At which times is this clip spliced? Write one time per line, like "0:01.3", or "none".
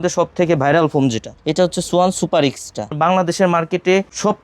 0:02.9